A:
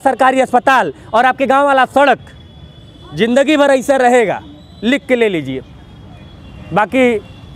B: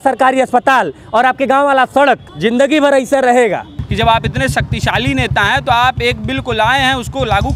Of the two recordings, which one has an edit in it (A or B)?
B